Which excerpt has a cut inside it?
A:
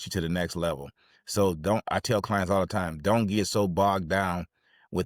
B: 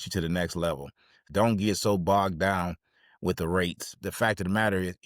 B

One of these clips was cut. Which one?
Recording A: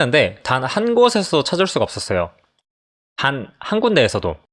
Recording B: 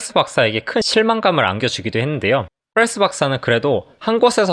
B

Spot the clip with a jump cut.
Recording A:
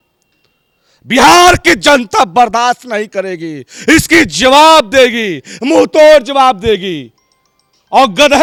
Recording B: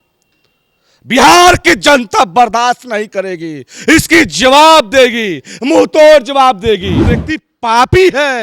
B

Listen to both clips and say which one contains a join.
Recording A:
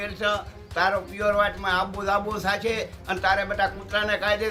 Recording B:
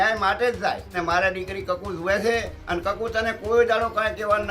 B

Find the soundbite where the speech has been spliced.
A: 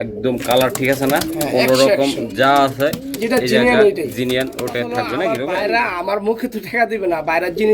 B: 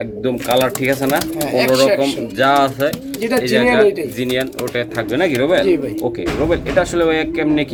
A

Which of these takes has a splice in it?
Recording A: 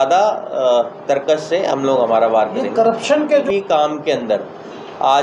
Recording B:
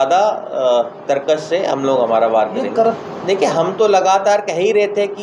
A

